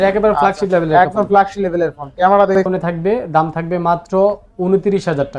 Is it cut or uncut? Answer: cut